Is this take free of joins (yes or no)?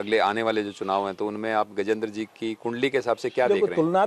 yes